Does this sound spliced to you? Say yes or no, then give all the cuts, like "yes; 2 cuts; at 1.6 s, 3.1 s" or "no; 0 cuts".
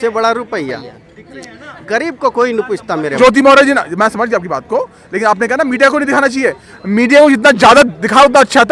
yes; 1 cut; at 3.2 s